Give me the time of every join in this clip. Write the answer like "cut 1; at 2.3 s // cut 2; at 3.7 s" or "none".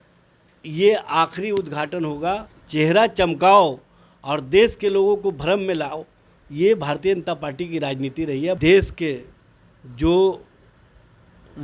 cut 1; at 2.6 s // cut 2; at 8.6 s